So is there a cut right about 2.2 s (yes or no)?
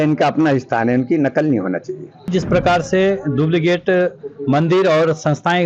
yes